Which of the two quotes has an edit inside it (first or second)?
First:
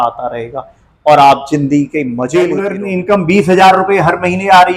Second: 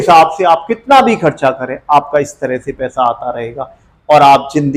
first